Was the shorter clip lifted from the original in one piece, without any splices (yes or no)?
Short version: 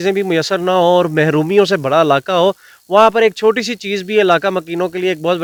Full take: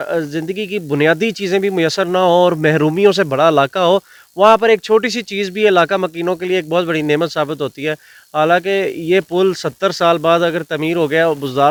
yes